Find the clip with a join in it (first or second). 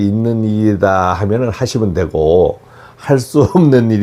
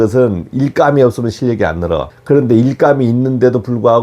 second